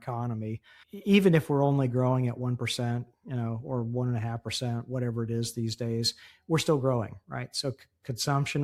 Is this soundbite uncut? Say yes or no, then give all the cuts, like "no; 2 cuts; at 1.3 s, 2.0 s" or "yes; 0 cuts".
yes; 0 cuts